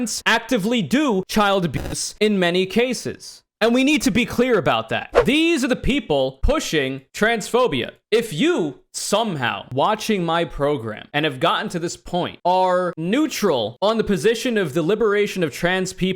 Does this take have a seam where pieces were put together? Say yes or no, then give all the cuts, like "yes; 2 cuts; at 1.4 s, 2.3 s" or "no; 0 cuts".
yes; 1 cut; at 5.1 s